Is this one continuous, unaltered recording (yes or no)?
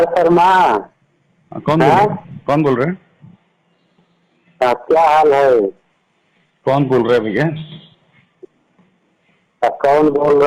yes